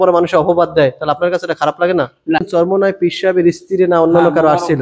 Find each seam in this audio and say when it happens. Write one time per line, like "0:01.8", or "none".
0:02.4